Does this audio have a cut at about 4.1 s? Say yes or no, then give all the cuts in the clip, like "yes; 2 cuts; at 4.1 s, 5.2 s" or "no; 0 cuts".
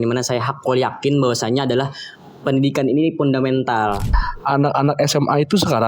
yes; 1 cut; at 4.1 s